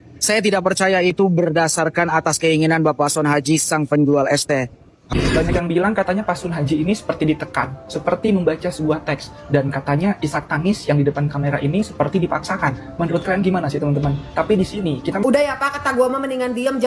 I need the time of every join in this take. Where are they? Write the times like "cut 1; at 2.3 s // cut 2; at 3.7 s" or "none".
cut 1; at 5.0 s // cut 2; at 15.2 s